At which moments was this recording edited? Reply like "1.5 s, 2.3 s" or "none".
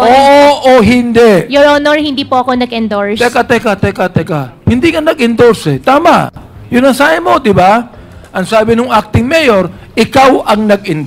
none

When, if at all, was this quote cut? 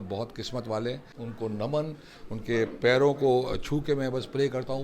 1.1 s

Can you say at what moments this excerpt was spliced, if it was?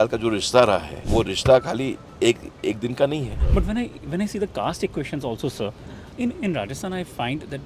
1.0 s, 3.4 s

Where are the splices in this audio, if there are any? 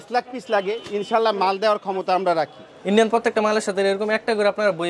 2.7 s

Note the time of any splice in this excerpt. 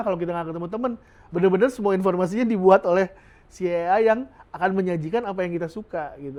none

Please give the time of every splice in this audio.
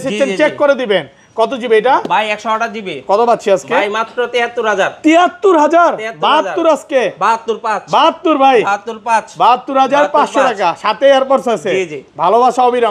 none

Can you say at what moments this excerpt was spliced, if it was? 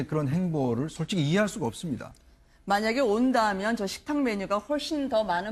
none

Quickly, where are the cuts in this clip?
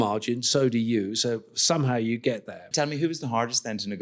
2.6 s

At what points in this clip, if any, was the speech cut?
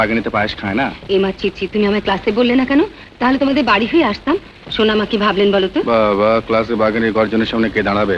none

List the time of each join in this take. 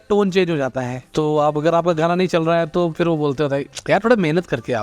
1.0 s

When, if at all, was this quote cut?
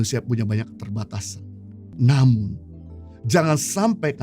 1.9 s

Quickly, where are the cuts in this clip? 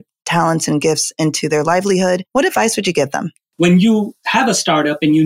3.5 s, 4.2 s

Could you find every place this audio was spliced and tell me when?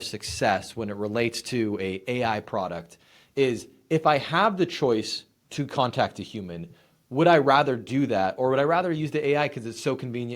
none

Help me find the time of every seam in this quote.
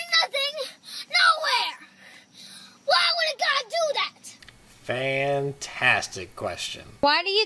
5.4 s

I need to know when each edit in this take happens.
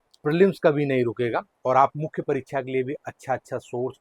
none

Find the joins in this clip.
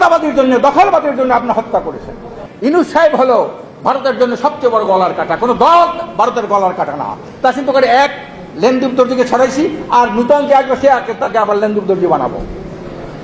2.7 s

